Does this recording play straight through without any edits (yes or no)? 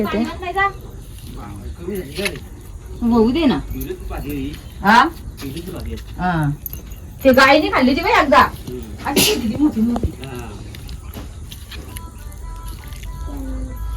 yes